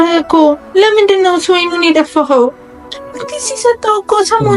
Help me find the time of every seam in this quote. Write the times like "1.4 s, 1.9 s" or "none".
3.0 s